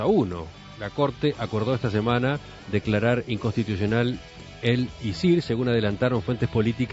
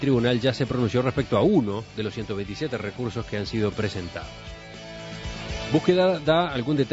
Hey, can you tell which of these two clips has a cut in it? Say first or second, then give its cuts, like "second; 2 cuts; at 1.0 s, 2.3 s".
first; 1 cut; at 2.8 s